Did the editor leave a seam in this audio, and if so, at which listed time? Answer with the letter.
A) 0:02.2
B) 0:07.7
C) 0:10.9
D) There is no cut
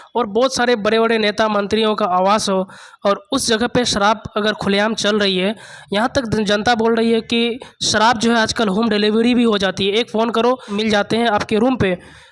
C